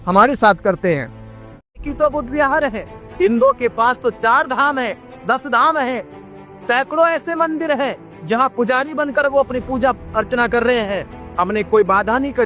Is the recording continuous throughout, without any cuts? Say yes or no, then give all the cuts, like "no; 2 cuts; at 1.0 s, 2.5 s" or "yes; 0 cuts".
no; 1 cut; at 1.9 s